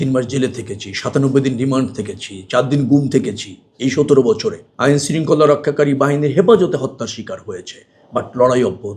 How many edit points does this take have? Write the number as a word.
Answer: one